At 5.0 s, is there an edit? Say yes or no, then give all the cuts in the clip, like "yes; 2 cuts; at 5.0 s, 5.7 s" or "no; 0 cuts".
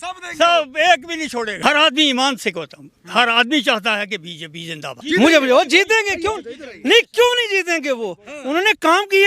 yes; 2 cuts; at 1.5 s, 5.0 s